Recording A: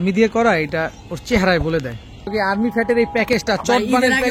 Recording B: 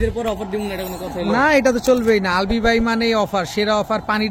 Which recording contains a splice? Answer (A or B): A